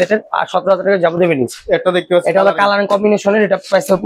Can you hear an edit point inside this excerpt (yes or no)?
no